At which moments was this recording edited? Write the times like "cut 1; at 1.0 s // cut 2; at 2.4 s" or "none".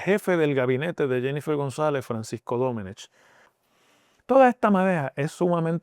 cut 1; at 3.5 s

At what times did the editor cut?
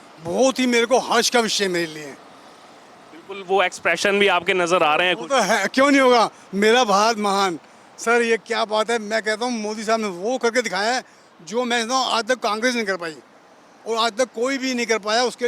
none

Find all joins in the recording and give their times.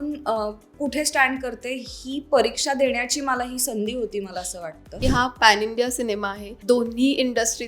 cut 1; at 4.9 s // cut 2; at 6.5 s

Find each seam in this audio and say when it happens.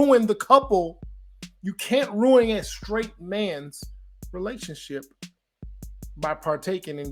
none

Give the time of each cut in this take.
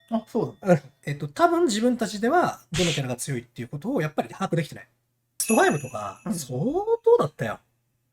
cut 1; at 1.0 s // cut 2; at 5.3 s

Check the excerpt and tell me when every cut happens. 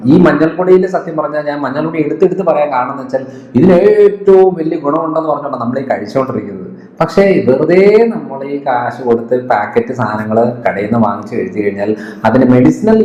none

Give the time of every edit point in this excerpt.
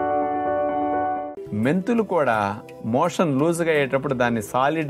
cut 1; at 1.2 s

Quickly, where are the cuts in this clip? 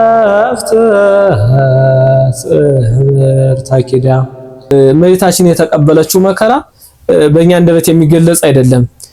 cut 1; at 4.7 s

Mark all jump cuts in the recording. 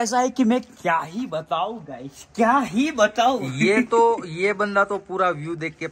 none

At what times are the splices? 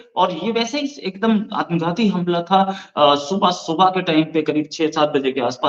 none

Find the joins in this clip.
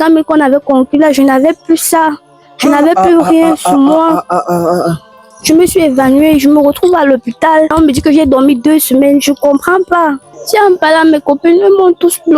cut 1; at 5.2 s // cut 2; at 7.7 s // cut 3; at 10.3 s

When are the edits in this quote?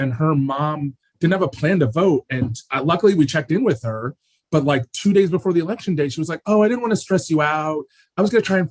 cut 1; at 1.0 s

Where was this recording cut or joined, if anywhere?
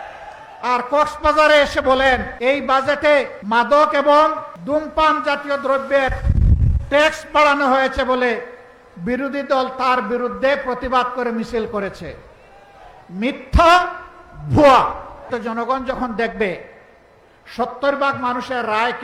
cut 1; at 2.3 s // cut 2; at 3.4 s // cut 3; at 4.5 s // cut 4; at 15.3 s

